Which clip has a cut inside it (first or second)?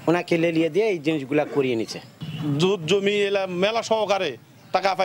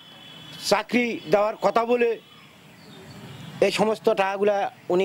first